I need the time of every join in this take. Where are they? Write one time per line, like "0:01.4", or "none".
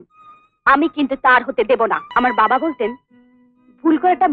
0:02.0